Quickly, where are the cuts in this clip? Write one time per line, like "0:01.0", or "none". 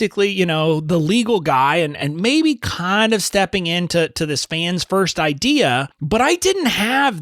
0:05.9